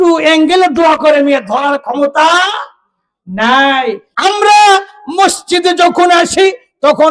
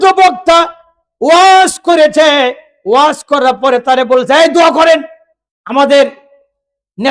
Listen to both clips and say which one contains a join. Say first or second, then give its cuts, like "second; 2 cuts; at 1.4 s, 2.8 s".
first; 1 cut; at 4.1 s